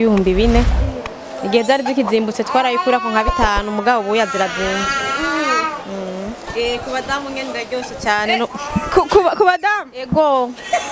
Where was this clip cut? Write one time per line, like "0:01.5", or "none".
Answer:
0:06.3